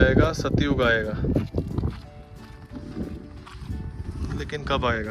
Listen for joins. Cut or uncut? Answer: uncut